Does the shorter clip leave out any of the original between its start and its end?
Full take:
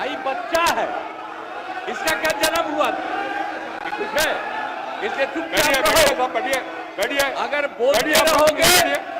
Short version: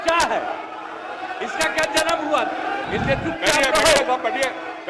yes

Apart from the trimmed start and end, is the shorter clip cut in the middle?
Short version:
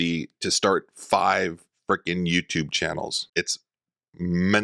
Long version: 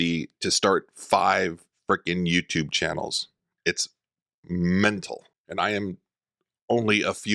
yes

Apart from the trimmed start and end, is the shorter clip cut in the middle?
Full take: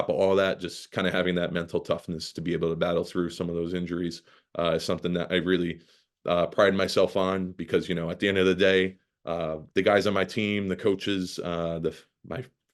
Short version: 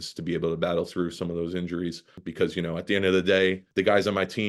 yes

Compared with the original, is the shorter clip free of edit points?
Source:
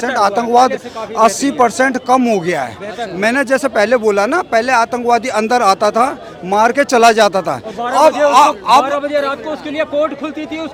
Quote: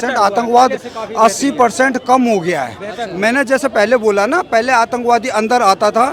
yes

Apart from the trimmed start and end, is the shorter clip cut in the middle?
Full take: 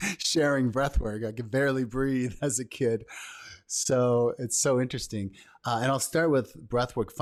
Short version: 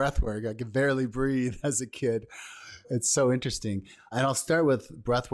yes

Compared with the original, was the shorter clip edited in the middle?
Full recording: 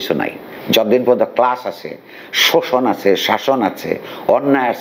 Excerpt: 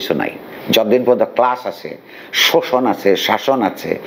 no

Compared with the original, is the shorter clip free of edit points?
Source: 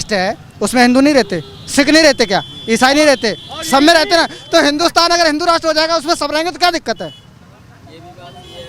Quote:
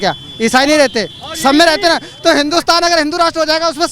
yes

